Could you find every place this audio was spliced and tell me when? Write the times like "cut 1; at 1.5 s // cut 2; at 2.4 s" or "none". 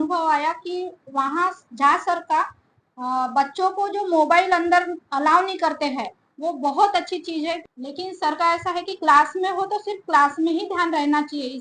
cut 1; at 7.6 s